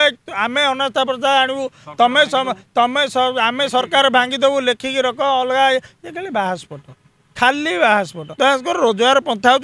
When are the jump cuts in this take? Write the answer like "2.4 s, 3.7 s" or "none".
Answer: 8.2 s

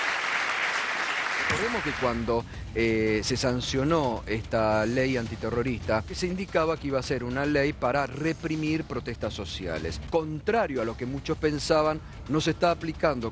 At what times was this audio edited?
none

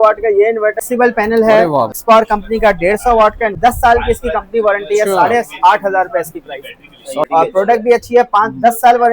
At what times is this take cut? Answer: 0.8 s, 2.0 s, 3.6 s, 7.2 s

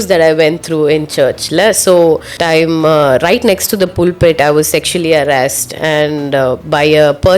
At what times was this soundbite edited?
2.3 s

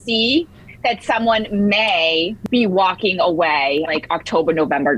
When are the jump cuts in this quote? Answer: 2.3 s, 3.9 s

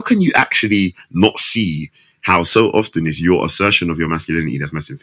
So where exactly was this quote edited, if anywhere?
none

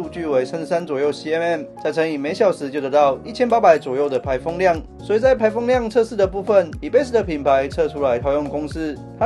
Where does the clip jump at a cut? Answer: 4.9 s

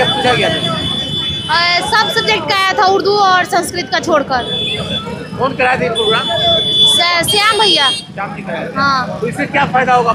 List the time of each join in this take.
none

